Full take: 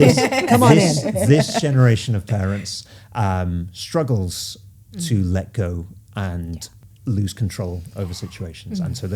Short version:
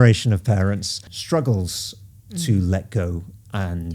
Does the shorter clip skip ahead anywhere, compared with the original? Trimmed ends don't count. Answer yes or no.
yes